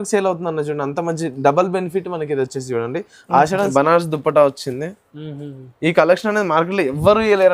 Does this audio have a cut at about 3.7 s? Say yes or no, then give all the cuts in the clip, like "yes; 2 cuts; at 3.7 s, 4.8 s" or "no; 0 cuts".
yes; 1 cut; at 3.7 s